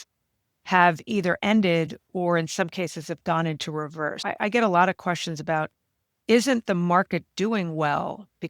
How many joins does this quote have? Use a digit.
1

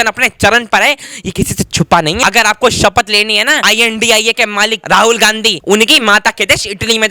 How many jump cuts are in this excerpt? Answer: 4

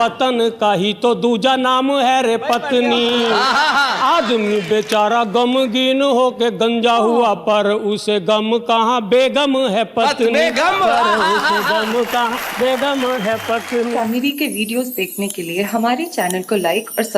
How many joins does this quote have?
1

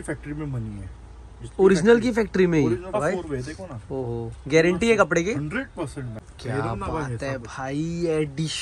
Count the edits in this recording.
2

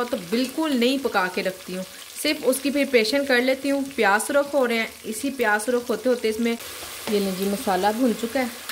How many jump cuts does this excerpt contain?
1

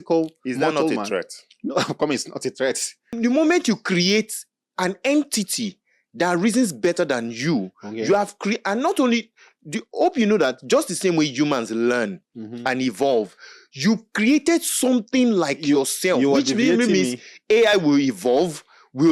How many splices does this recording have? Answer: 1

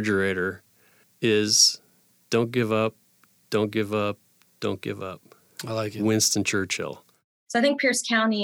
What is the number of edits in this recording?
1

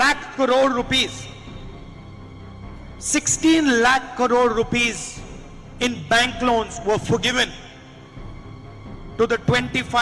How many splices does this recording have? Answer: 0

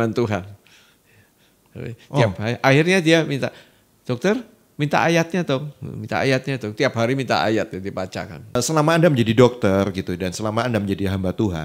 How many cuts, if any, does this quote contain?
1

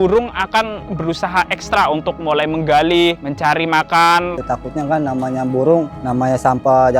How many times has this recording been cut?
1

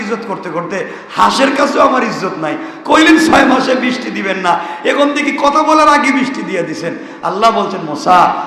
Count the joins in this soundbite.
0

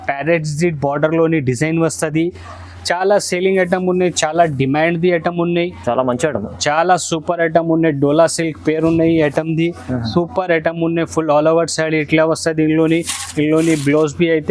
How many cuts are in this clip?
0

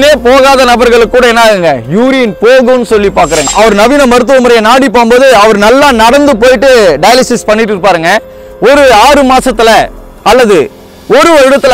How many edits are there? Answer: 1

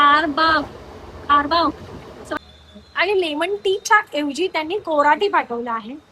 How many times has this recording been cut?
1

